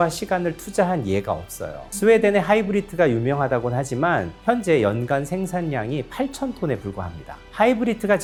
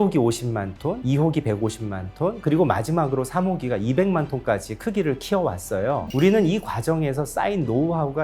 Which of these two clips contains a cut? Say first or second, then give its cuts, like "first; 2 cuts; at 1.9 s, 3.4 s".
second; 2 cuts; at 1.0 s, 6.1 s